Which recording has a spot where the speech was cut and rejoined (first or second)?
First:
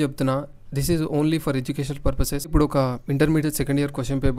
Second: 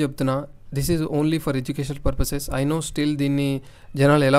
first